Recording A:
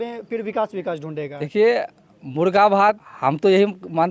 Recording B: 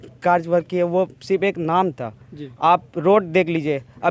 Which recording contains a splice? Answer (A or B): A